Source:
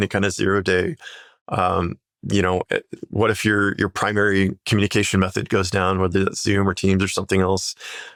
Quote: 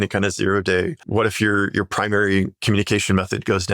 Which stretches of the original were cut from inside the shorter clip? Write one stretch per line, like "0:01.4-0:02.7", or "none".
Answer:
0:01.0-0:03.0